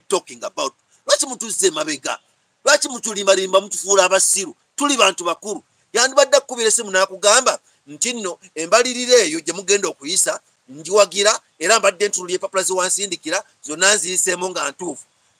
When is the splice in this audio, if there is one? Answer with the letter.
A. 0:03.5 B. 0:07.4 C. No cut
C